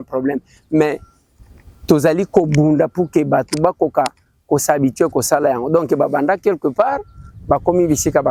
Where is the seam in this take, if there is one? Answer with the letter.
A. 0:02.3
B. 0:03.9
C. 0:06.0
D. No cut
D